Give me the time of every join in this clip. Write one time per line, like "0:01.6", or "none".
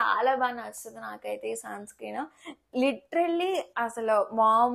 none